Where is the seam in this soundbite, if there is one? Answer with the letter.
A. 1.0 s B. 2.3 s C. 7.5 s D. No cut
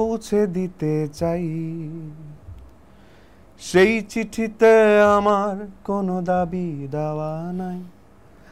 D